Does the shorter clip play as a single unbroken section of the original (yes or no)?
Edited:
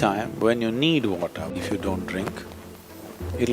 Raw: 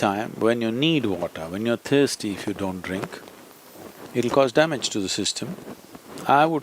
no